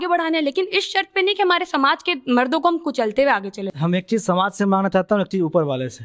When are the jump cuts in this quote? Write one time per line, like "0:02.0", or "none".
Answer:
0:03.7